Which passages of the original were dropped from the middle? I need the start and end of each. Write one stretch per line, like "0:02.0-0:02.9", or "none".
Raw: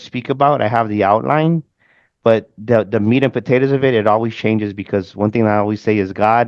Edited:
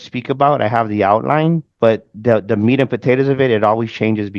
0:01.7-0:02.1